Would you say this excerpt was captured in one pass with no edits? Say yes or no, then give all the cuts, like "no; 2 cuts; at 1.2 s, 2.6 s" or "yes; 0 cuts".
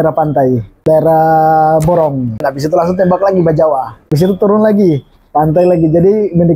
no; 3 cuts; at 0.8 s, 2.5 s, 4.1 s